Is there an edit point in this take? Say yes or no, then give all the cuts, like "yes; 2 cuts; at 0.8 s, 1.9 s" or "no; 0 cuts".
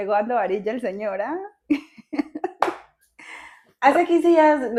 no; 0 cuts